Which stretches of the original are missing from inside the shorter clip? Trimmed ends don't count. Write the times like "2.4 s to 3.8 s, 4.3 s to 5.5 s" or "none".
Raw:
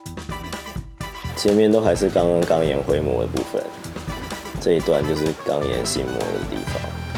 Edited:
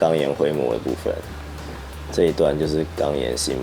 none